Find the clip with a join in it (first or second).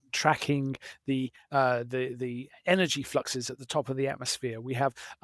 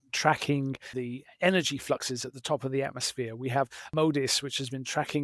second